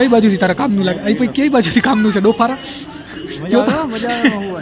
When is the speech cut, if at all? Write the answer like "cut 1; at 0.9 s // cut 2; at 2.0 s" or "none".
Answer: none